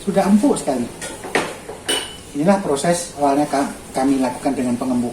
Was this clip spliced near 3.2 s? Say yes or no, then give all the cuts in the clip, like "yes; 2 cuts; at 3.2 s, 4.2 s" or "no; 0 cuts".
yes; 1 cut; at 3.2 s